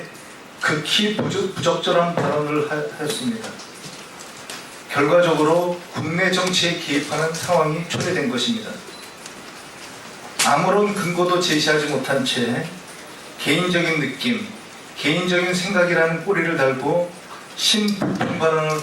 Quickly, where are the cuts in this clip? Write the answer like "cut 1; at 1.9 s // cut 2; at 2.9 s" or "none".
cut 1; at 7.9 s